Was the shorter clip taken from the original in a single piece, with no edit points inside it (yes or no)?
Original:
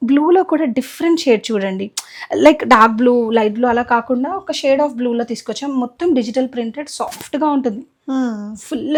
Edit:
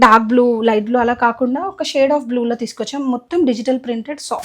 yes